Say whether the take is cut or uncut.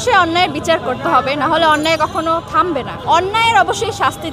uncut